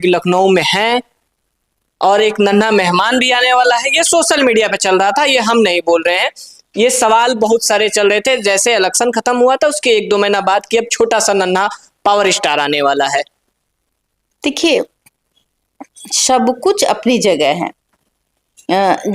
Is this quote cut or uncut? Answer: uncut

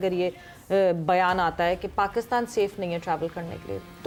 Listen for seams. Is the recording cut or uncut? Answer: uncut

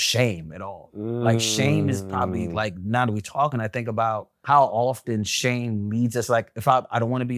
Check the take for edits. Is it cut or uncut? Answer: cut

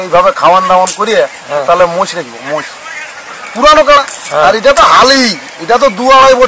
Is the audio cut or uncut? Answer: cut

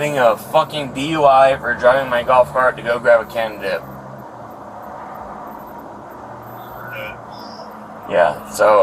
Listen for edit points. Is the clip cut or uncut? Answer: uncut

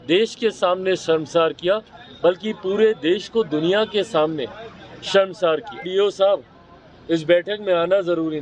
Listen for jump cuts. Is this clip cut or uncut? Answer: cut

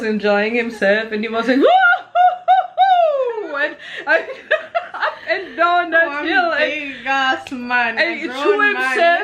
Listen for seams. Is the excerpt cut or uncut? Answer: uncut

